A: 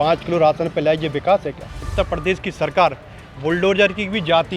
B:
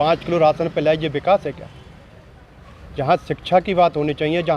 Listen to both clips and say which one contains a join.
A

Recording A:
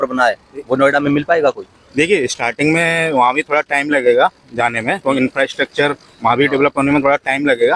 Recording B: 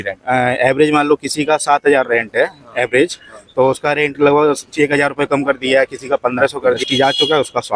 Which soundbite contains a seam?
B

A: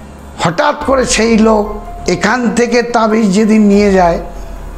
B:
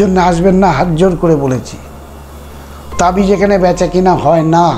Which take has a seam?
A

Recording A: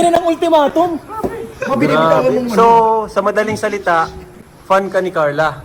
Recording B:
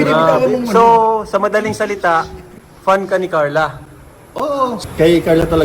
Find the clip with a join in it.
B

